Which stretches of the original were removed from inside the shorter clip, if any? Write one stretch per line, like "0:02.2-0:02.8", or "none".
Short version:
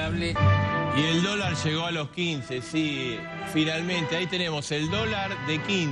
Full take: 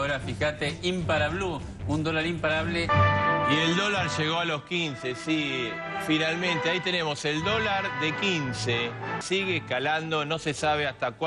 none

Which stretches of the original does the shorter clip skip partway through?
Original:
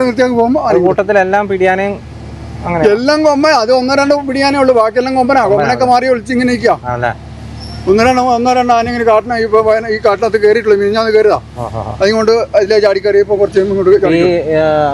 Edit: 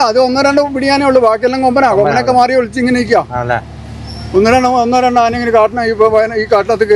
none

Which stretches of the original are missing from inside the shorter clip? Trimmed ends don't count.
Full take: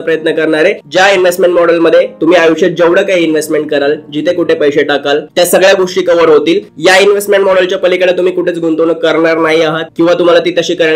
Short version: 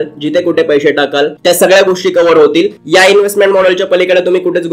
none

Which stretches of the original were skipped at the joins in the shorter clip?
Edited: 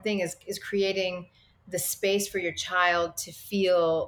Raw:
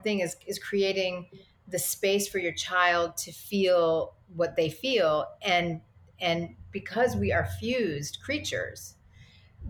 none

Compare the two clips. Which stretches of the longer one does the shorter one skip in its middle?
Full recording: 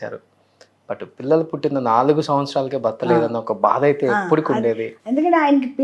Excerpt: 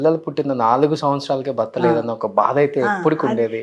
none

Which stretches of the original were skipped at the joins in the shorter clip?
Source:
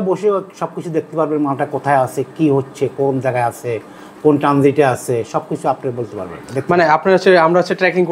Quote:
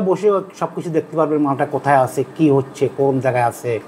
none

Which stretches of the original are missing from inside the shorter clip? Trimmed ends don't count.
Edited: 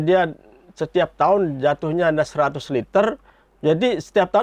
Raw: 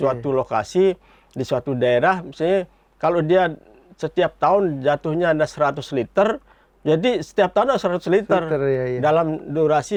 none

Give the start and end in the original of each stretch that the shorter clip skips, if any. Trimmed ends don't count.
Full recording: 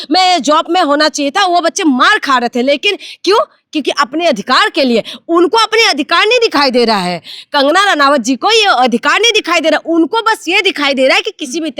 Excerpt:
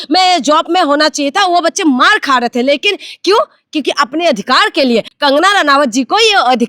0:05.1-0:07.4

